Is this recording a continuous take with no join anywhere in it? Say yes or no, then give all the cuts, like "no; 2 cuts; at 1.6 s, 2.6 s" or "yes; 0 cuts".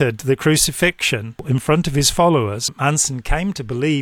no; 2 cuts; at 1.4 s, 2.7 s